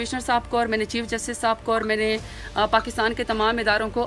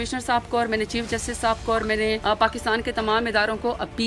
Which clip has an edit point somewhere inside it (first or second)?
second